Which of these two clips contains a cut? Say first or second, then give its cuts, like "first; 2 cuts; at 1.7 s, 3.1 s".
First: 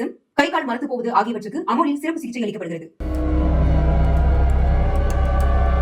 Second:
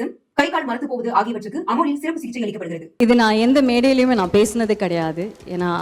second; 1 cut; at 2.9 s